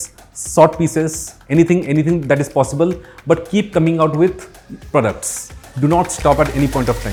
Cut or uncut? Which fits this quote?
uncut